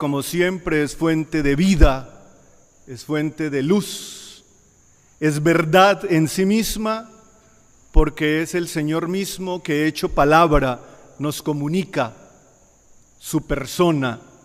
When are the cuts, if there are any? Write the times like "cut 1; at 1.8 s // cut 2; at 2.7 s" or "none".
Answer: cut 1; at 6.5 s